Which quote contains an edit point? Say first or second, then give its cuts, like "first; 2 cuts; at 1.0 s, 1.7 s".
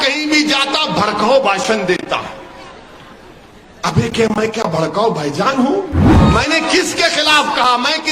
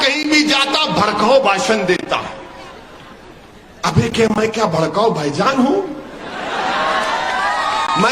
first; 1 cut; at 6.1 s